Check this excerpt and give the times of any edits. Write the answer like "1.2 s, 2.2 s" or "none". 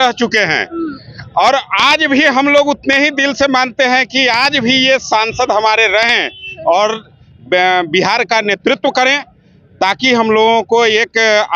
none